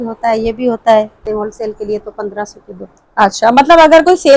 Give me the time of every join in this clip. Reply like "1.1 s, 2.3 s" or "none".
1.2 s